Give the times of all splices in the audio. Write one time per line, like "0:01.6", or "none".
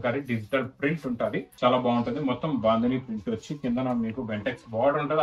0:01.5